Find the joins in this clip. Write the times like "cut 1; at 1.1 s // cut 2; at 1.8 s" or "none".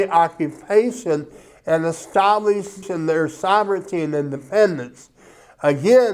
cut 1; at 2.9 s